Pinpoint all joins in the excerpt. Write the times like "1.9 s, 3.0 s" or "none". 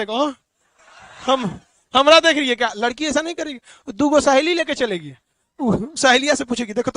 none

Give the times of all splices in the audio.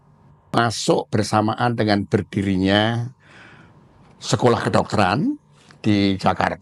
none

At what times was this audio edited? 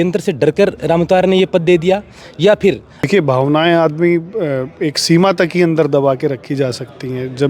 3.1 s

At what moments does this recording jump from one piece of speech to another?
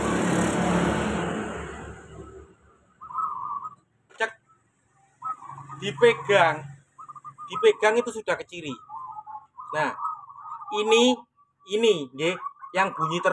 none

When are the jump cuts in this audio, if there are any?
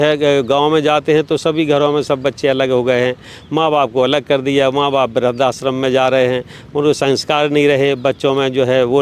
none

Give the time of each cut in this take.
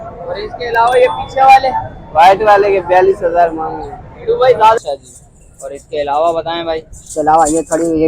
4.8 s

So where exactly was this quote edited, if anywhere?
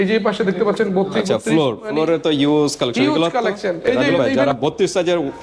4.3 s

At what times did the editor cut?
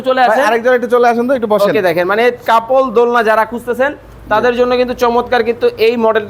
none

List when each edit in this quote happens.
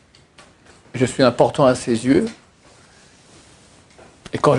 none

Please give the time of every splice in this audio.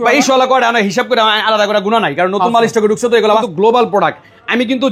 3.4 s

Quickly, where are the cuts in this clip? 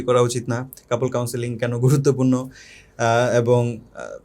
none

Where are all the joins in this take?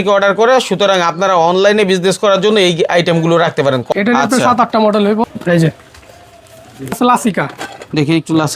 3.9 s, 5.2 s, 6.9 s

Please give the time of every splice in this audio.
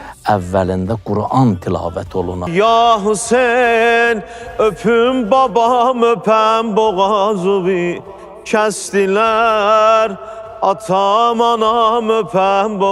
2.4 s

